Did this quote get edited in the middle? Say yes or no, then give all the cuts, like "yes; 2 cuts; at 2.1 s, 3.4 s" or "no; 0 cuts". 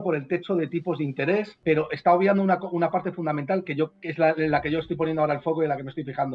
yes; 1 cut; at 1.5 s